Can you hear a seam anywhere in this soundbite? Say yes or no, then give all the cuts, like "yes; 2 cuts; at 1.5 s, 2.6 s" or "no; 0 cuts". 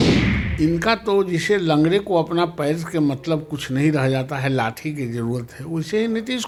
no; 0 cuts